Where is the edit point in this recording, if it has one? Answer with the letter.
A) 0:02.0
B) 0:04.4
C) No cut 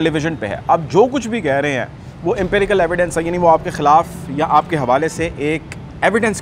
C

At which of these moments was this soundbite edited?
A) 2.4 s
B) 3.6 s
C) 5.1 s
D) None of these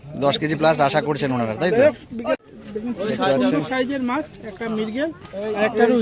A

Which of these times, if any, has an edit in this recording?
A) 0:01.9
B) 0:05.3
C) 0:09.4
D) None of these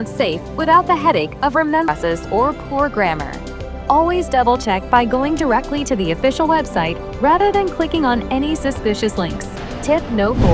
A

